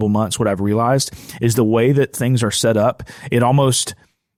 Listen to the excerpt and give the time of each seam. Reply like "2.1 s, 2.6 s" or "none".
none